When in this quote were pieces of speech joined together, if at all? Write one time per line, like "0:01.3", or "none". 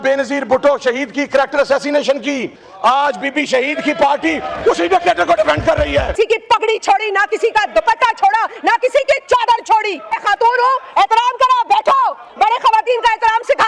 0:02.6
0:06.2
0:10.2